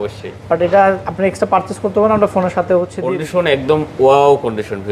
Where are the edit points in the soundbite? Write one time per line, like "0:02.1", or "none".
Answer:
0:03.0